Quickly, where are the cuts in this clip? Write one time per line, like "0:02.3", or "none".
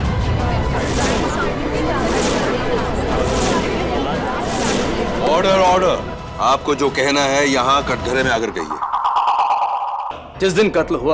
0:10.1